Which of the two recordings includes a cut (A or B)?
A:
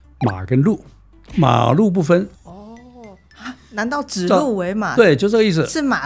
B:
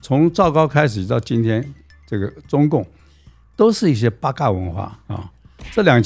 A